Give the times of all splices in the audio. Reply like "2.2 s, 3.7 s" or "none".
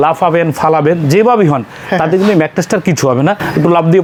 none